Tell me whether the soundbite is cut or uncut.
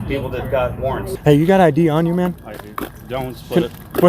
cut